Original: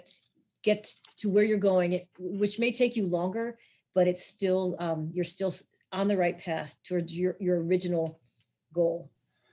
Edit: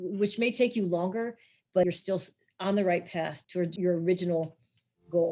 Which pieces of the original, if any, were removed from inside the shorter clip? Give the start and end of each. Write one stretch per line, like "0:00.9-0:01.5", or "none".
0:04.0-0:05.2
0:07.0-0:07.4